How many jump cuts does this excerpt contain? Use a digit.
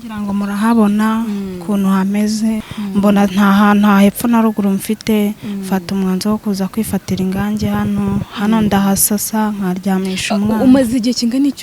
1